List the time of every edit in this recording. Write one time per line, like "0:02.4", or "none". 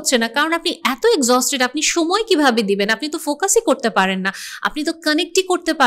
none